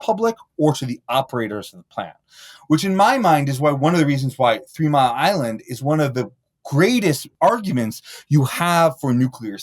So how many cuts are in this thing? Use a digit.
1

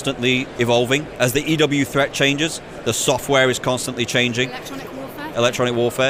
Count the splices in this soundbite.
0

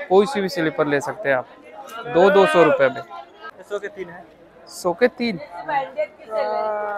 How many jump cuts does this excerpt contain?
1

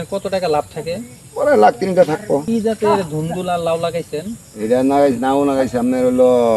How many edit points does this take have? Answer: 1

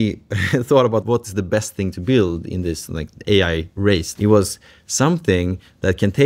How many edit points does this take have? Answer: 2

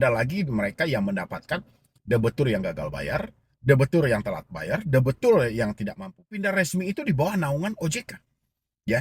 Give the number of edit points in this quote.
1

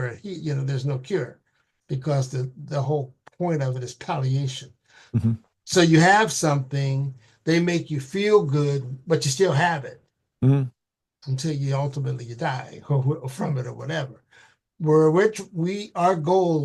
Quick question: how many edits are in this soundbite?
0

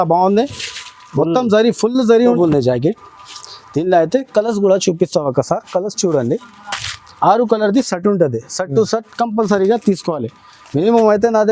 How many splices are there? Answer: 1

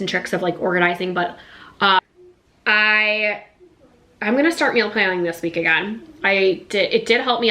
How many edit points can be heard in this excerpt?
1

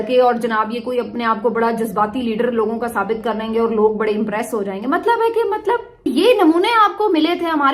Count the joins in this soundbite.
1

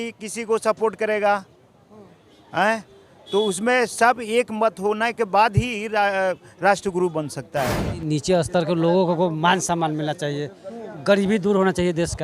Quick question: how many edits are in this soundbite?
1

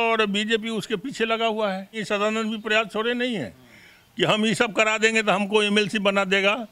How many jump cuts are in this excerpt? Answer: 1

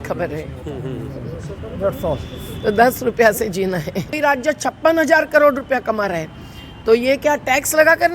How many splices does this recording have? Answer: 1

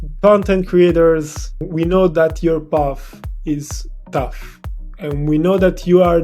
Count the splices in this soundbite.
1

